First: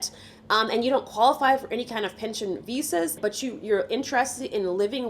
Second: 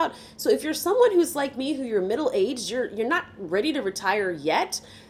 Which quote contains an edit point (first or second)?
first